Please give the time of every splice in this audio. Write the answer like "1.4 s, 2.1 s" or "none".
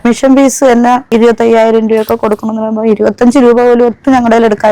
1.1 s